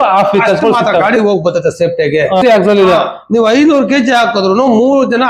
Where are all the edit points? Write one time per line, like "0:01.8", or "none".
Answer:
0:02.4